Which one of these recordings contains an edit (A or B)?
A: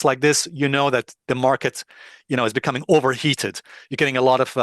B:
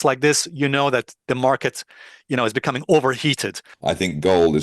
B